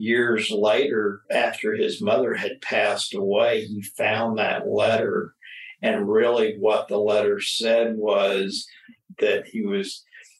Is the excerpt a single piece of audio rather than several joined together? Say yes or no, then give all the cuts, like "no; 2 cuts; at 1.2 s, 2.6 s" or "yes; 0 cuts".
no; 2 cuts; at 1.2 s, 9.0 s